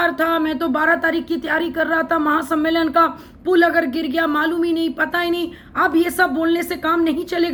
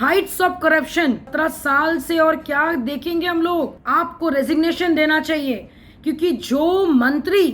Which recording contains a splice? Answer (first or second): second